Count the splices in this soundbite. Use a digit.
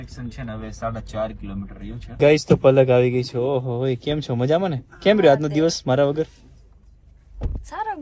1